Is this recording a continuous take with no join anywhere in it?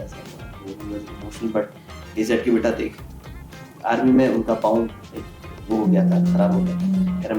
yes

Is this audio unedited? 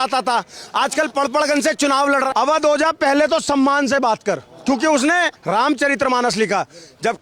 no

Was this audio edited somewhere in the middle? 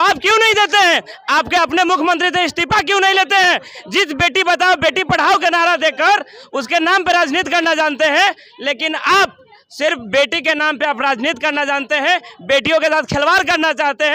no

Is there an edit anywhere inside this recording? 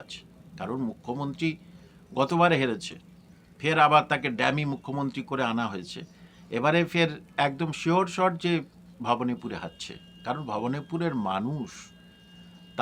no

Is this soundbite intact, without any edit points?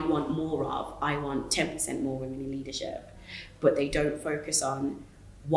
yes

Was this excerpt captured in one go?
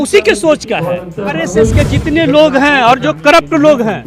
no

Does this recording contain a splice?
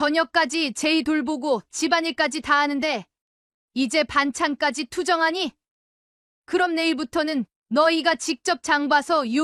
no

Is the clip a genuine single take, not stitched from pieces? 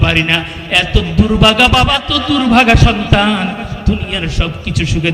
no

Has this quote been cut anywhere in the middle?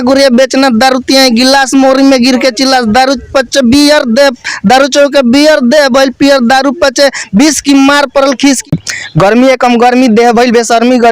yes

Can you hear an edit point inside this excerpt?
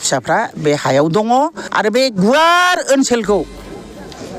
yes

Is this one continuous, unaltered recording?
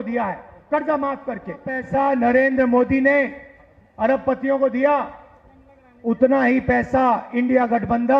no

